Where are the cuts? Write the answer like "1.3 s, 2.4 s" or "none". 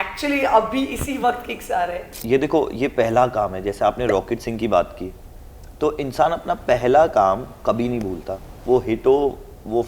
2.1 s